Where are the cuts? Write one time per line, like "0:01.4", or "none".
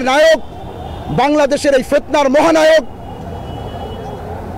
none